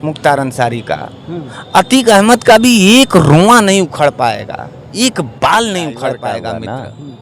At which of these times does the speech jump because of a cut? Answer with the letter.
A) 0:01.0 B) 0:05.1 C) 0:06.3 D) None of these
C